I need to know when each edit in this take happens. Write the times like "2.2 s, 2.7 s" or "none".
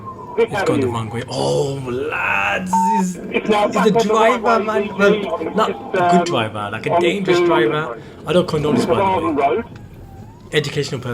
none